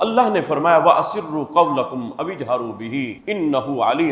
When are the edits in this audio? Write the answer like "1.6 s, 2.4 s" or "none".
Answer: none